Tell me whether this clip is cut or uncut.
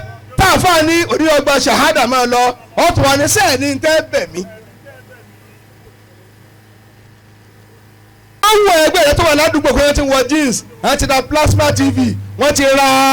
cut